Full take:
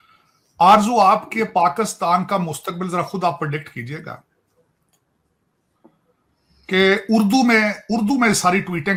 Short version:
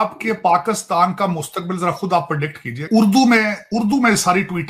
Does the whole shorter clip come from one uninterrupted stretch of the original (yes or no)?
no